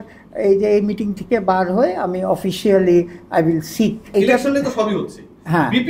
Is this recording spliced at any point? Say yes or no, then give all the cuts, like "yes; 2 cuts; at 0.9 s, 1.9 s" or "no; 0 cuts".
yes; 1 cut; at 4.1 s